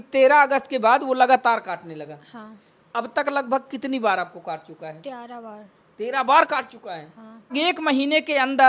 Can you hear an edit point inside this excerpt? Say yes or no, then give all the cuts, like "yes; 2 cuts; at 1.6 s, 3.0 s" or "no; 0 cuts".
yes; 1 cut; at 7.5 s